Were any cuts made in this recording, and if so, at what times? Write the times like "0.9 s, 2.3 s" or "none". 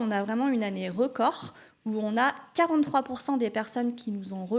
none

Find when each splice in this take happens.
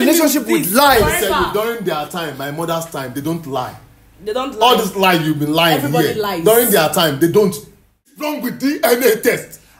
8.2 s

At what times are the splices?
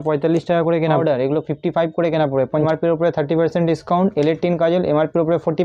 1.0 s, 2.7 s

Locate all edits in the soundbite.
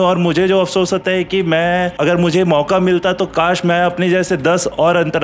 1.9 s

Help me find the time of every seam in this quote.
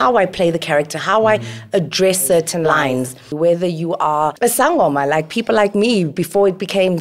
3.2 s, 4.3 s

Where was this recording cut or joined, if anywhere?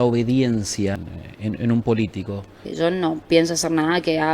1.1 s, 2.7 s

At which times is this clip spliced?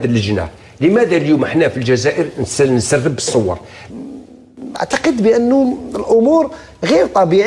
3.8 s

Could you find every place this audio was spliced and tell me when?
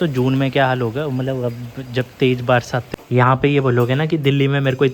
2.8 s

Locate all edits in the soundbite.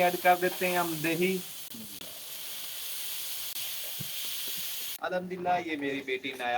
1.6 s, 3.6 s, 4.9 s

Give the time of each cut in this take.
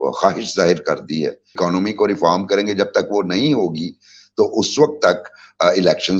1.5 s

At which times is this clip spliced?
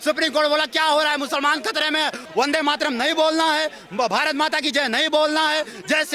2.2 s

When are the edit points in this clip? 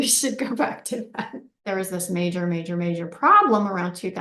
1.6 s

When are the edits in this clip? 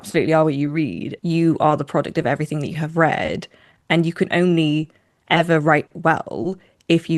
1.1 s

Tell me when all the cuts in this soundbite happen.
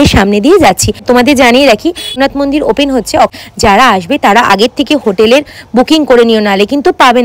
1.0 s, 2.2 s, 3.4 s

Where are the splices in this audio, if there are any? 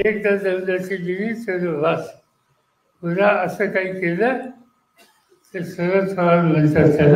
none

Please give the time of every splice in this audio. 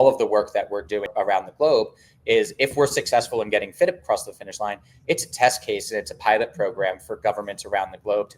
1.1 s

